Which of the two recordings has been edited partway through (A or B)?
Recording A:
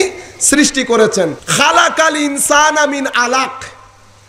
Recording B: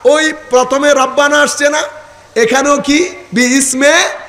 A